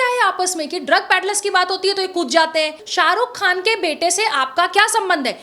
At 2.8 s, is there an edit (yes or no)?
yes